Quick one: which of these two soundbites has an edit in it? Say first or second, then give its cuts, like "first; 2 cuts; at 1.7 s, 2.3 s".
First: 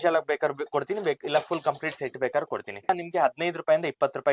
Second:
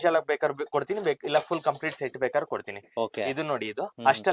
first; 1 cut; at 2.9 s